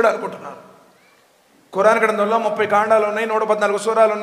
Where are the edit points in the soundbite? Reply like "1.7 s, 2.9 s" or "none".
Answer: none